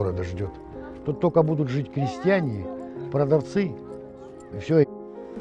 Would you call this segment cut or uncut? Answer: uncut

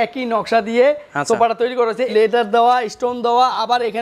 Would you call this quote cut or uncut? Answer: cut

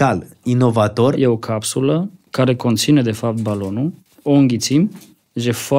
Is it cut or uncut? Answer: cut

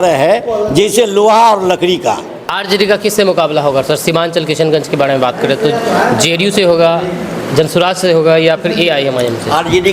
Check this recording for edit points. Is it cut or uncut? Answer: cut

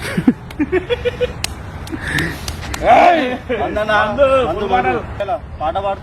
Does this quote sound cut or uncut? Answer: cut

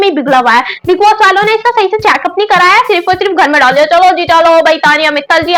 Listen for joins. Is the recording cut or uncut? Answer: uncut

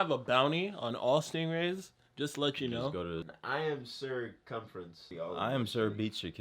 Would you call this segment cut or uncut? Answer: cut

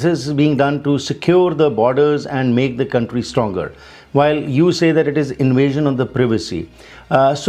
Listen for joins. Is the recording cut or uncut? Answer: uncut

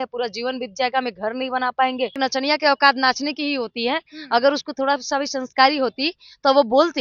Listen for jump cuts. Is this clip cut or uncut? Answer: cut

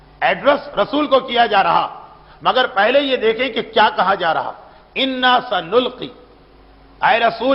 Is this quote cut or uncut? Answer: uncut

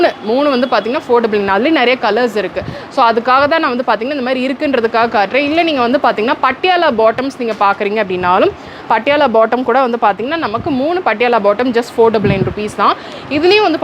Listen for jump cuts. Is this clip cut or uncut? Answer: uncut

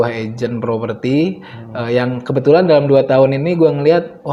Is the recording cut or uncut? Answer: uncut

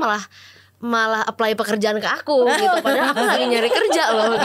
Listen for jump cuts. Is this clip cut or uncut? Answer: uncut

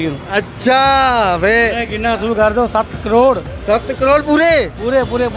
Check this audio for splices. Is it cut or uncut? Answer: uncut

